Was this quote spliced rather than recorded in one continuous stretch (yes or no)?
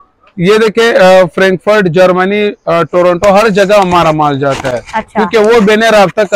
no